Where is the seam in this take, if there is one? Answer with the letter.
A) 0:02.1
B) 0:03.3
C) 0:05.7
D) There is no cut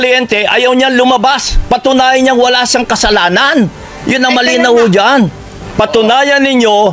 C